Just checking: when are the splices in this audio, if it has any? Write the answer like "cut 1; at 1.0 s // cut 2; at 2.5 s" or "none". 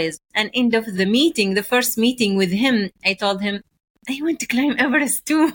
cut 1; at 0.9 s